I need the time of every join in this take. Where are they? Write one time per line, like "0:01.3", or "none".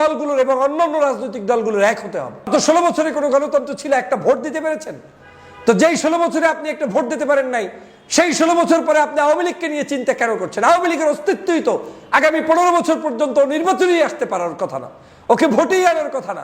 0:02.5